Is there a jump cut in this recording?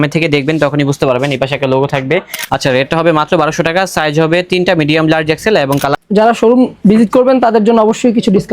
yes; 2 cuts; at 2.4 s, 6.0 s

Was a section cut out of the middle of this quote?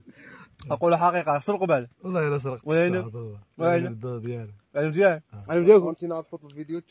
no; 0 cuts

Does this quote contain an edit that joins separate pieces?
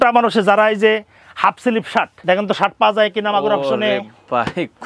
yes; 1 cut; at 2.1 s

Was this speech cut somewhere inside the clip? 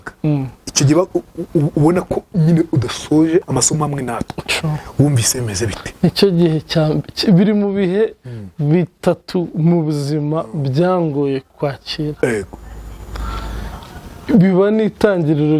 yes; 1 cut; at 3.5 s

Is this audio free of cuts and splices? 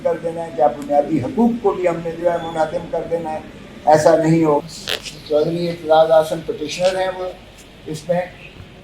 no; 1 cut; at 4.6 s

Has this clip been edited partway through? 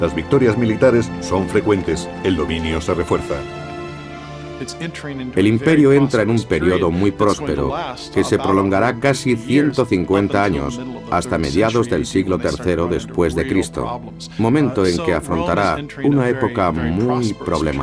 no; 0 cuts

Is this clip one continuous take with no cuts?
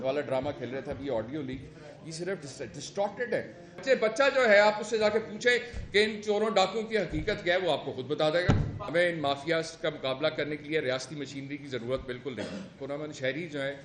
no; 3 cuts; at 3.8 s, 8.9 s, 12.7 s

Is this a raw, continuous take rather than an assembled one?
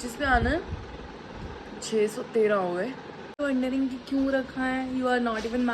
no; 1 cut; at 3.4 s

